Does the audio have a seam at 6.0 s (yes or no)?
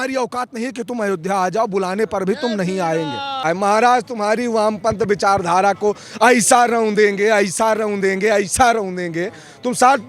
no